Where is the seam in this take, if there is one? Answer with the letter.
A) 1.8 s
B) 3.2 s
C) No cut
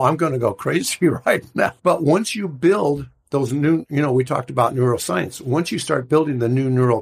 A